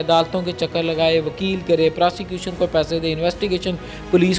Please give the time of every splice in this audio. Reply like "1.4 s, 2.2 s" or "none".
none